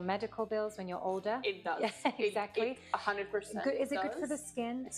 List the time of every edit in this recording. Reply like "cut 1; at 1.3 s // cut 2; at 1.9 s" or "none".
none